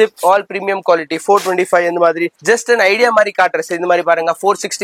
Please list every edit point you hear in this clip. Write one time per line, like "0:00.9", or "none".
0:02.3